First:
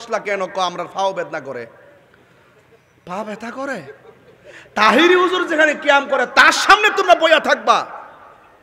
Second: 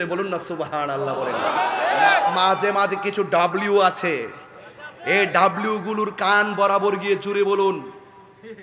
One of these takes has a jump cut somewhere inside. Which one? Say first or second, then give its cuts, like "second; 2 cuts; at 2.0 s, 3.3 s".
second; 1 cut; at 1.8 s